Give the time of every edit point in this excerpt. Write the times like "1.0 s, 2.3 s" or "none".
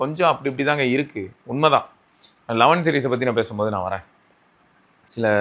none